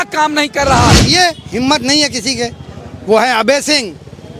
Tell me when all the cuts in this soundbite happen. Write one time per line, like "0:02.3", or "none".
0:01.1